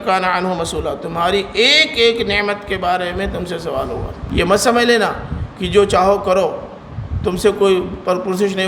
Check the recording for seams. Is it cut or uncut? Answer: cut